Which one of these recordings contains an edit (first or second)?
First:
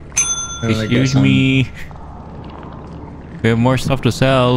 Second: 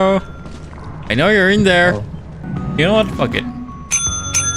second